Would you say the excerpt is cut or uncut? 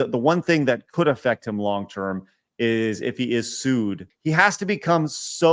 cut